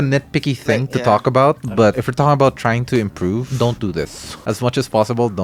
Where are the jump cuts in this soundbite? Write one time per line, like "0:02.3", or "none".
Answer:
none